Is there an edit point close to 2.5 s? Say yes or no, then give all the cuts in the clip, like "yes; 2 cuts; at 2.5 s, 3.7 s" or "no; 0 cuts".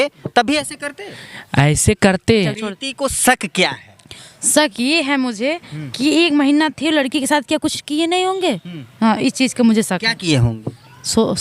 yes; 1 cut; at 2.5 s